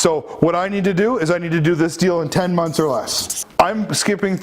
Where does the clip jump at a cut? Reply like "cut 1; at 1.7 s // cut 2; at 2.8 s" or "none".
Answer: cut 1; at 3.4 s